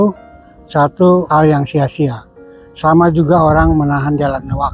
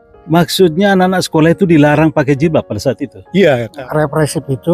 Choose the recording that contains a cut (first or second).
second